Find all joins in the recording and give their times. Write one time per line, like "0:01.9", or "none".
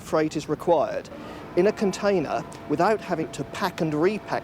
0:03.3